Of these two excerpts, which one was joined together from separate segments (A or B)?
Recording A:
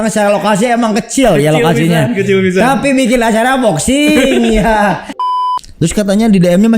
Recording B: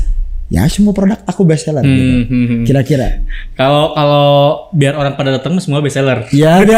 A